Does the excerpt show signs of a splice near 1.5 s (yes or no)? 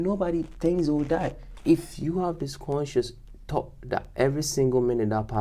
yes